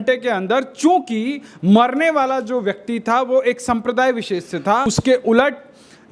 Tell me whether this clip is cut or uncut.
cut